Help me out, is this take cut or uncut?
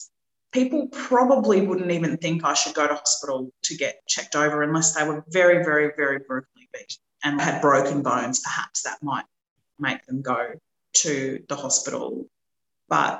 uncut